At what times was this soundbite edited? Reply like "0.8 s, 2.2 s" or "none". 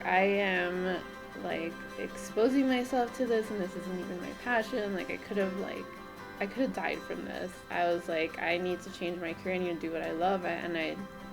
7.7 s